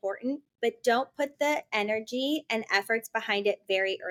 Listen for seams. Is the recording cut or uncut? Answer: uncut